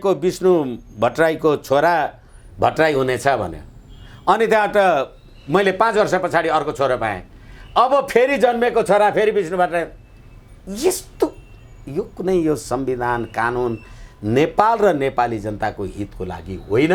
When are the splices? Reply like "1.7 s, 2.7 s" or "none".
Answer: none